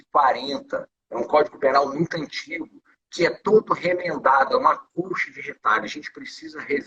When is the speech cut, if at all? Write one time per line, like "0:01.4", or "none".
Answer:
none